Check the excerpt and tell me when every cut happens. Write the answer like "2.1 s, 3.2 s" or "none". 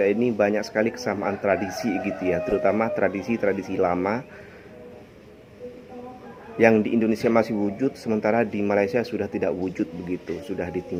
none